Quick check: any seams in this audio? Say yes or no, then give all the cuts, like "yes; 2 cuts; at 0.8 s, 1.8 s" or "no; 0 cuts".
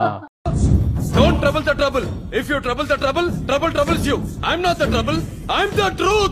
no; 0 cuts